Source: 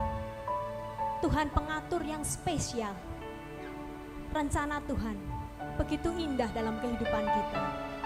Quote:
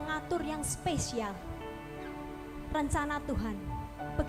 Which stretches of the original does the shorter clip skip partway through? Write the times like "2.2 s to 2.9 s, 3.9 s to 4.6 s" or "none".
none